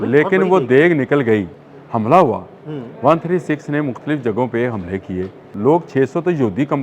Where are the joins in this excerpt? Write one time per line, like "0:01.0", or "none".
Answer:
0:01.6
0:05.5

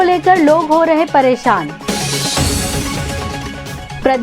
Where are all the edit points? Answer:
none

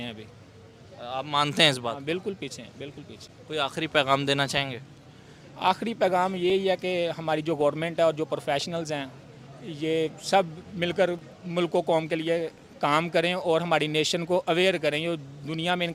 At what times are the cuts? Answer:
none

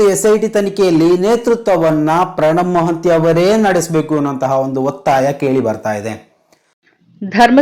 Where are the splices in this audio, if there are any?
0:06.7

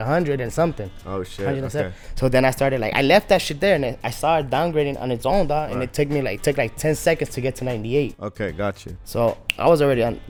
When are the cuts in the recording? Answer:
none

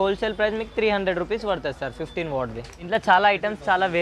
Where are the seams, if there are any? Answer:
0:02.9

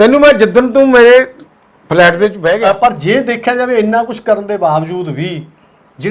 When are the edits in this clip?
0:02.6

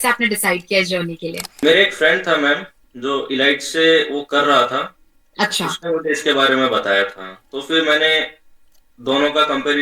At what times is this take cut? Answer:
0:01.6

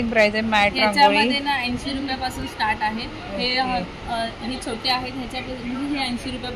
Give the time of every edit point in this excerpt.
none

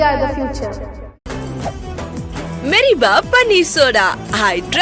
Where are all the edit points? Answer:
none

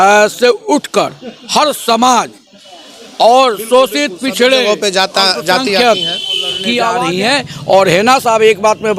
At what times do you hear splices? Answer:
0:07.1

